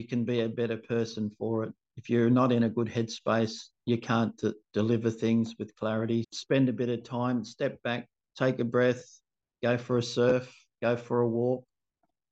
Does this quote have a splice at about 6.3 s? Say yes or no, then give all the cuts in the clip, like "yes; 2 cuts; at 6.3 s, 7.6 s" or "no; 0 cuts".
yes; 1 cut; at 6.3 s